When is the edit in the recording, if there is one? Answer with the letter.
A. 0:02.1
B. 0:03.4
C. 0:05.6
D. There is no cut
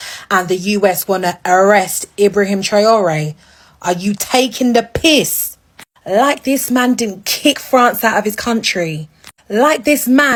D